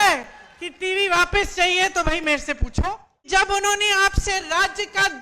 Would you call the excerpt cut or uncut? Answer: cut